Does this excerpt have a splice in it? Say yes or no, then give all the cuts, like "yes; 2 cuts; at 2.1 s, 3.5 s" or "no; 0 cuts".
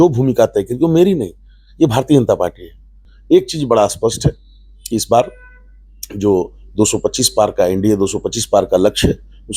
yes; 1 cut; at 3.1 s